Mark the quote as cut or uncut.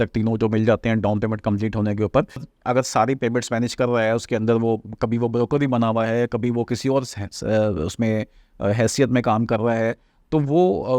cut